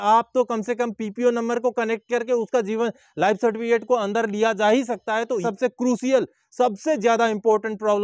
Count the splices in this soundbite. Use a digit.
1